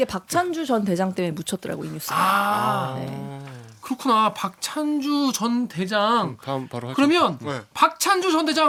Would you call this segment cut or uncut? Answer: uncut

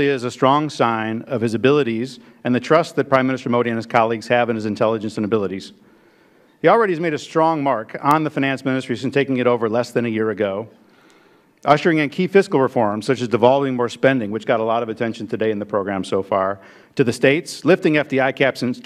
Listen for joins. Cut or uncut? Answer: uncut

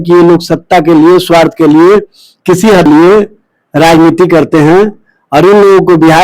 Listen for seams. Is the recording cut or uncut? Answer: cut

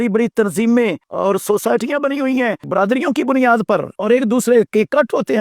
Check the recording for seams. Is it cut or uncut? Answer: cut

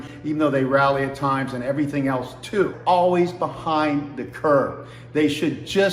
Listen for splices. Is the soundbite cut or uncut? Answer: cut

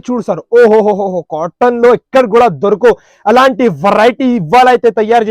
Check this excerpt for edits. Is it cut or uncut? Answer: uncut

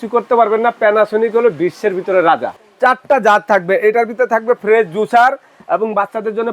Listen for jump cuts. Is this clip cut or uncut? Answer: cut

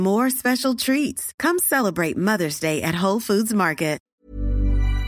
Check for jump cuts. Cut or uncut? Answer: cut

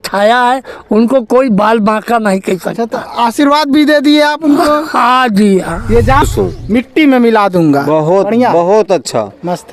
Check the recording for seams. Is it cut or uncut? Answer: cut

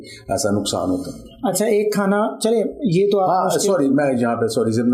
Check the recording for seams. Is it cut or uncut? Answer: uncut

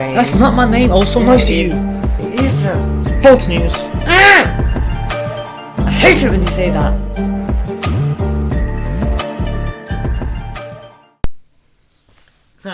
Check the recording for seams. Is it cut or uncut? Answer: uncut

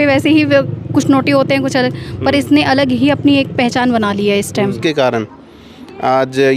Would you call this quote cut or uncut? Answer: cut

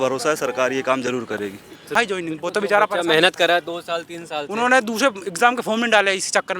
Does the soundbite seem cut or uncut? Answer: cut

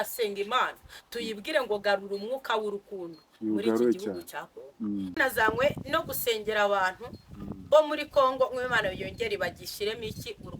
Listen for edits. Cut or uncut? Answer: cut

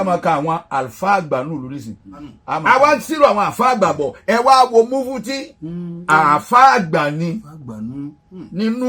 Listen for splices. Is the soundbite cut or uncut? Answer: cut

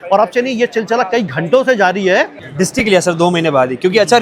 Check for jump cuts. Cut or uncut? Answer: cut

